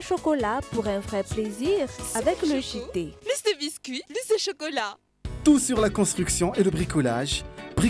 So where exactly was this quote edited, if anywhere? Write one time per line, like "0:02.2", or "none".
none